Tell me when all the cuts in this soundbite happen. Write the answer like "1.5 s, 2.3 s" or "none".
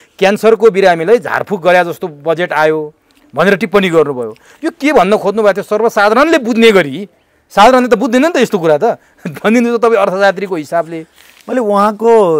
none